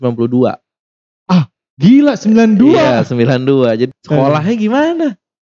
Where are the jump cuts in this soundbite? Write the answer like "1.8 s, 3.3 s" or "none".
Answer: 3.9 s